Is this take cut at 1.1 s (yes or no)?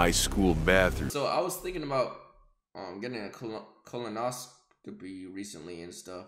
yes